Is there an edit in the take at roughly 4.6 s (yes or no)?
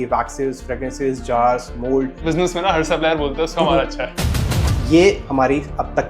yes